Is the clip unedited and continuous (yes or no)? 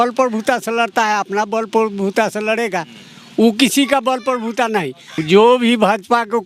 no